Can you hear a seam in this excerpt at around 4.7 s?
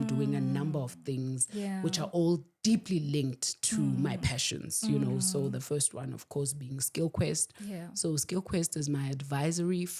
no; 0 cuts

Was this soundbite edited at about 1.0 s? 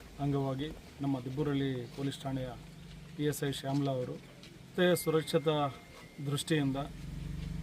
no; 1 cut; at 4.7 s

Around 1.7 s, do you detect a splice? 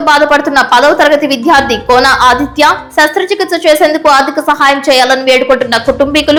no; 0 cuts

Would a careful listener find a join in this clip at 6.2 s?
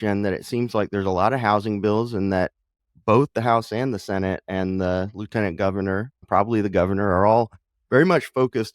yes; 1 cut; at 6.2 s

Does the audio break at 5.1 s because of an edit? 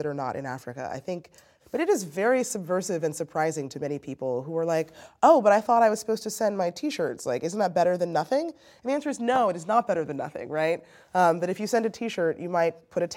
no; 1 cut; at 1.5 s

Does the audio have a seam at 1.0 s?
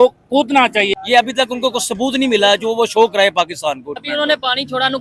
yes; 2 cuts; at 1.0 s, 4.0 s

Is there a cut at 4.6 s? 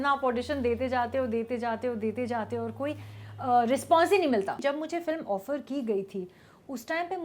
yes; 1 cut; at 4.6 s

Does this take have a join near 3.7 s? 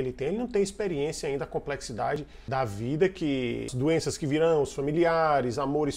yes; 2 cuts; at 2.5 s, 3.7 s

